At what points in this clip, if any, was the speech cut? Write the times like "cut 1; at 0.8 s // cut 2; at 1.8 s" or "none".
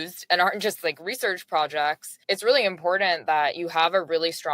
cut 1; at 2.1 s